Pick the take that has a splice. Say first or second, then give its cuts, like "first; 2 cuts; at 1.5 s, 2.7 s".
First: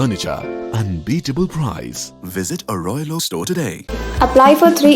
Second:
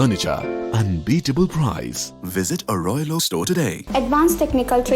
second; 1 cut; at 3.8 s